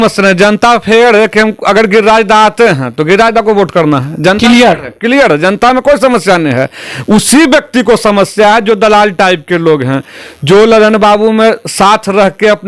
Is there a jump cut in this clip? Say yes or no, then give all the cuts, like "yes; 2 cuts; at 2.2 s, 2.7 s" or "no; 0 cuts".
no; 0 cuts